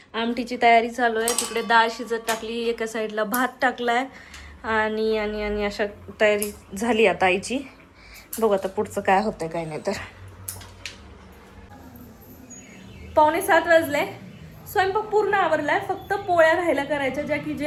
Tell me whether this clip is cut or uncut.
uncut